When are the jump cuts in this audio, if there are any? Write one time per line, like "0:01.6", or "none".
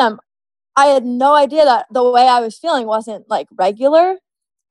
0:01.9